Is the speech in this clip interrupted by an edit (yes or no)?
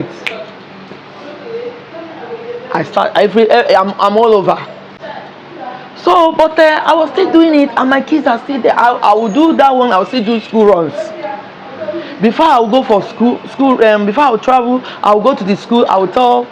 no